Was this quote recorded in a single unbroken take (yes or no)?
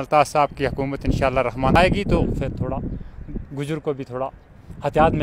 no